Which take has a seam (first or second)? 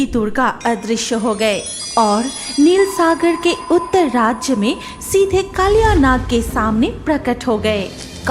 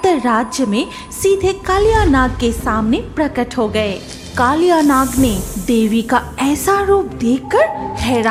first